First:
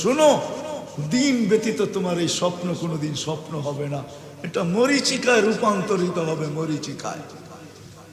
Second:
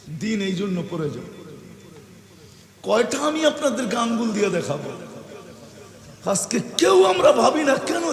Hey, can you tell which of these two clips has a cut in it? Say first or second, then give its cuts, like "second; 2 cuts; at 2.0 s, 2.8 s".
second; 1 cut; at 5.9 s